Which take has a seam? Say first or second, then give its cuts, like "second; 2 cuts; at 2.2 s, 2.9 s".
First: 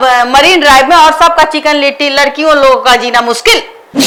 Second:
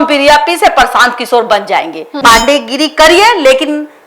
second; 1 cut; at 2.1 s